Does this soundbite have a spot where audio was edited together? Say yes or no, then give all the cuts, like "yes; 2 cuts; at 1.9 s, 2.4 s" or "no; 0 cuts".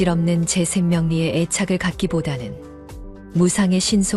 no; 0 cuts